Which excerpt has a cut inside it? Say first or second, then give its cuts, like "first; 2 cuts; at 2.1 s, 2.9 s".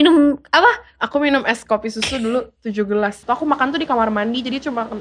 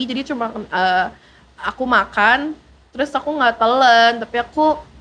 first; 1 cut; at 3.2 s